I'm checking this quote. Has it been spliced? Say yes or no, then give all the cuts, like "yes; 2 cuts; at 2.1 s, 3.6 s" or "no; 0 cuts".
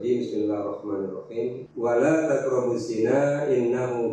yes; 1 cut; at 1.7 s